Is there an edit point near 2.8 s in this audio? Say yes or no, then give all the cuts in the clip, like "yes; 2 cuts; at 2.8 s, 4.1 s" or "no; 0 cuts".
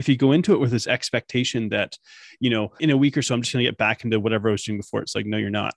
yes; 1 cut; at 2.8 s